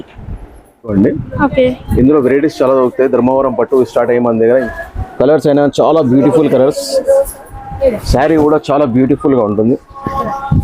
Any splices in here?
yes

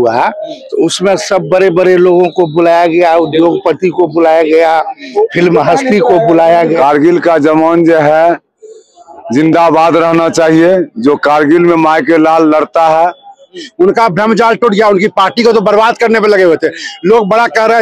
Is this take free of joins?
no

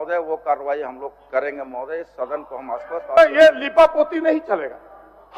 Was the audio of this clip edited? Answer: no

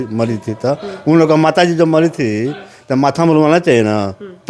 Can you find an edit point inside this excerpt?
no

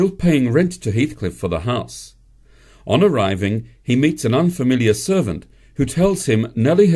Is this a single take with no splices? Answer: no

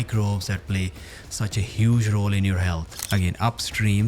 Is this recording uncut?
no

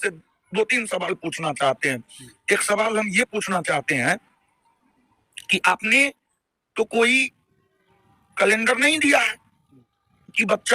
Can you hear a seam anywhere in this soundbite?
no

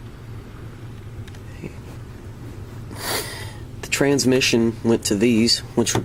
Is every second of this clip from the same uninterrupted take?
yes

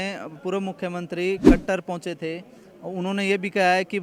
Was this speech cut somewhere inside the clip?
no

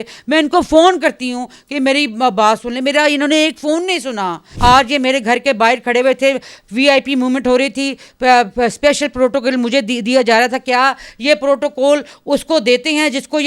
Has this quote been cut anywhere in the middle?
yes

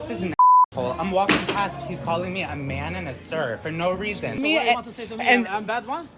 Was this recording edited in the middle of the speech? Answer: yes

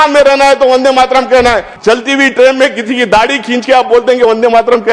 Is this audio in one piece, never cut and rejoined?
no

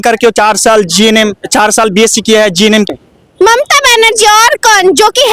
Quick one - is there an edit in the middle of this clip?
yes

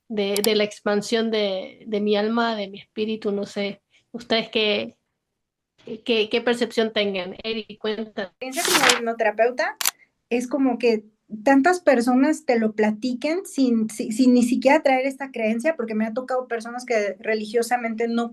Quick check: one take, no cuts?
no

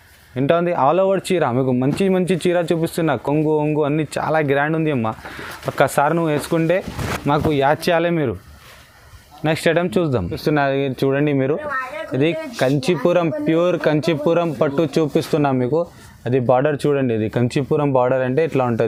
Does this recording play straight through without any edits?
yes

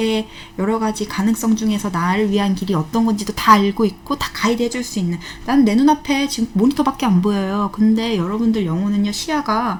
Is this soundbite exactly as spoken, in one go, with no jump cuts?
yes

